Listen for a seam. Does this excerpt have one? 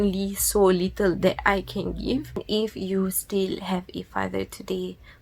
yes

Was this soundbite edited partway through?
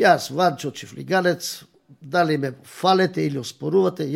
no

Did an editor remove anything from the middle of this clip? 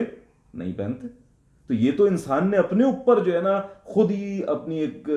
no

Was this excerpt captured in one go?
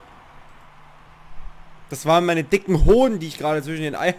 yes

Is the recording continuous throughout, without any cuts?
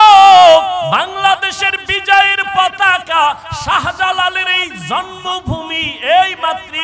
no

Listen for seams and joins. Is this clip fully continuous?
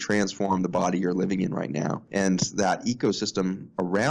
yes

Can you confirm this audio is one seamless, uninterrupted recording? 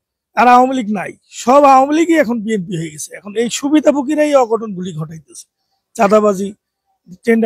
yes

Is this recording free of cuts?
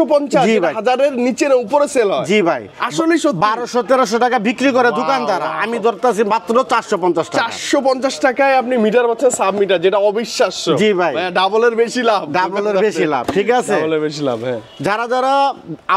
yes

